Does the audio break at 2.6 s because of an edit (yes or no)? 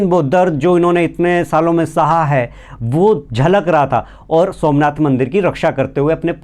no